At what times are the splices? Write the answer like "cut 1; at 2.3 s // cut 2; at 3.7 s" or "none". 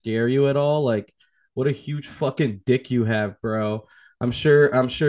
none